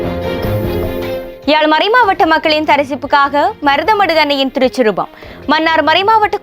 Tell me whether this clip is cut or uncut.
cut